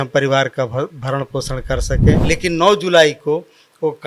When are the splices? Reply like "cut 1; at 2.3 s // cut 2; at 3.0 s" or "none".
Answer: cut 1; at 2.2 s